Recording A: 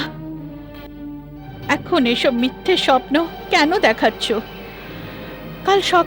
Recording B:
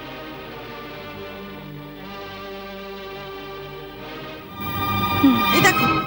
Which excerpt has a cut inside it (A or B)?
B